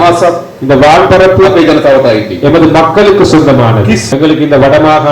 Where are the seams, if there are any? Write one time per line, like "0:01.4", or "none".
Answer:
0:04.1